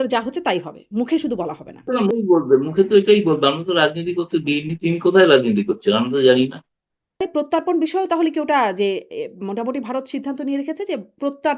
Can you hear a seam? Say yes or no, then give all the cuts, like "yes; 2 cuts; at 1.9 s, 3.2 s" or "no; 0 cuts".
yes; 2 cuts; at 2.1 s, 7.3 s